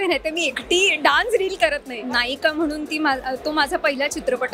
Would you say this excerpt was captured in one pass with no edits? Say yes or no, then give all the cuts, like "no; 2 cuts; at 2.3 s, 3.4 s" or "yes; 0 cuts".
no; 1 cut; at 2.0 s